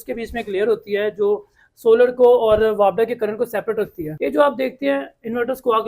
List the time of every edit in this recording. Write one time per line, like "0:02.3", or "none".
0:04.1